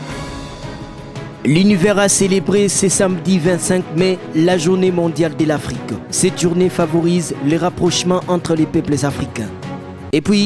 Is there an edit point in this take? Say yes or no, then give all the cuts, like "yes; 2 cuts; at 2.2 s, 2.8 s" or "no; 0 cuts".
yes; 1 cut; at 1.4 s